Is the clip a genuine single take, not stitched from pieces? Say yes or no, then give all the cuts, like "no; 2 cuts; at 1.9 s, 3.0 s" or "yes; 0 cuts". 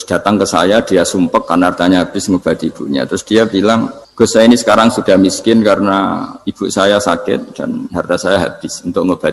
no; 1 cut; at 4.0 s